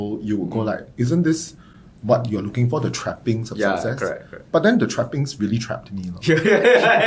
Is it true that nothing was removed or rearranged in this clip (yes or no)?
yes